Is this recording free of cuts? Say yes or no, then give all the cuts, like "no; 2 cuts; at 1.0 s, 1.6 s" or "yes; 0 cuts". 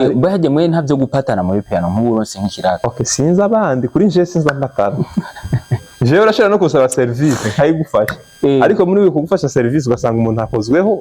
yes; 0 cuts